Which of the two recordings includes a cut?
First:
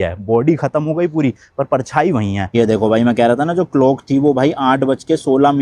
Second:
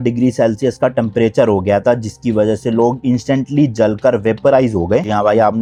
first; 1 cut; at 2.5 s

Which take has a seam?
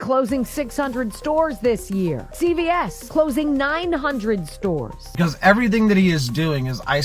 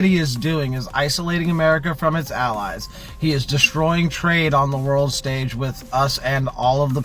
first; 3 cuts; at 2.3 s, 3.0 s, 5.0 s

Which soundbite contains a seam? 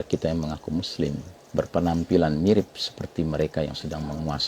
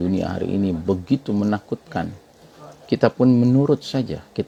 first; 1 cut; at 1.3 s

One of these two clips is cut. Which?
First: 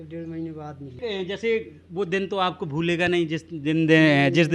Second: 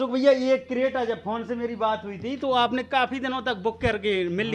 first; 1 cut; at 1.0 s

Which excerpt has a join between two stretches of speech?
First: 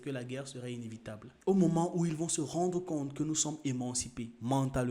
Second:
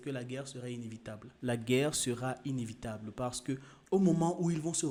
first; 1 cut; at 1.3 s

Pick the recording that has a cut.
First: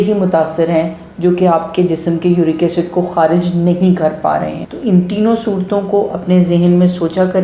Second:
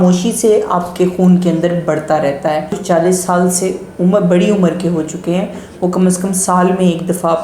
second; 1 cut; at 2.7 s

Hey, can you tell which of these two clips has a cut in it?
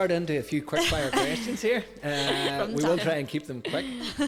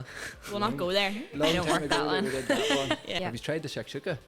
second; 1 cut; at 3.2 s

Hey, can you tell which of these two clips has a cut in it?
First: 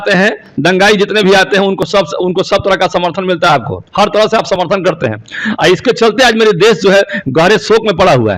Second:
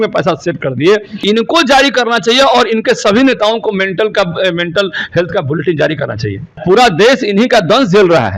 second; 2 cuts; at 1.1 s, 6.6 s

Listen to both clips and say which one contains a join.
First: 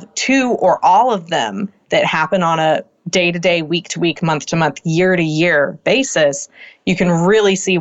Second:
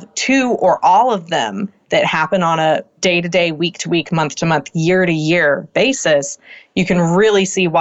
second; 1 cut; at 2.9 s

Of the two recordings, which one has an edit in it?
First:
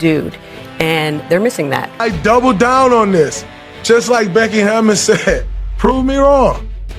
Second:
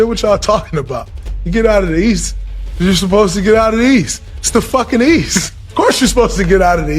first; 1 cut; at 1.9 s

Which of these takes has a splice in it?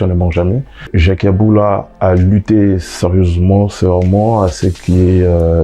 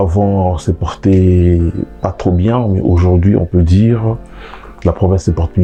first; 1 cut; at 0.9 s

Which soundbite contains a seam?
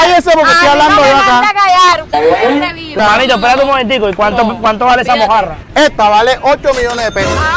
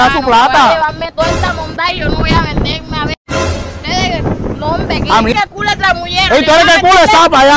second; 1 cut; at 5.3 s

